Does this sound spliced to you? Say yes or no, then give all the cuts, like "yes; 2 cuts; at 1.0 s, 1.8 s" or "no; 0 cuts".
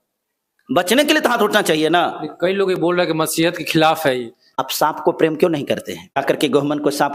yes; 2 cuts; at 4.6 s, 6.2 s